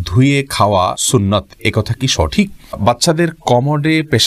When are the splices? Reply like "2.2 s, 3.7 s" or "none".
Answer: 1.0 s, 2.8 s